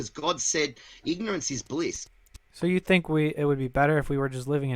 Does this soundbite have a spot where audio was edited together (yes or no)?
yes